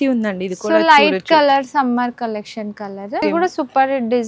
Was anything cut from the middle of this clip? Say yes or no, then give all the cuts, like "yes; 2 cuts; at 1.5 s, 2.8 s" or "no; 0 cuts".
yes; 1 cut; at 3.2 s